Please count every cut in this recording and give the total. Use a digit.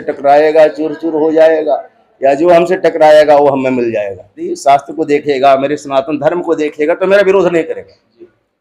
1